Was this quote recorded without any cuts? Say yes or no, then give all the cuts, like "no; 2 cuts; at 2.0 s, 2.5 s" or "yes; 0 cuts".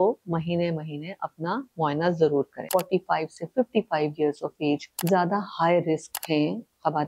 no; 3 cuts; at 2.6 s, 4.9 s, 6.1 s